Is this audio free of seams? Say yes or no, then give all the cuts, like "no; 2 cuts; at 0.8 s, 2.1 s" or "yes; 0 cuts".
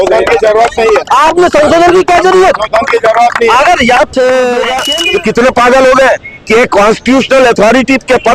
no; 1 cut; at 4.8 s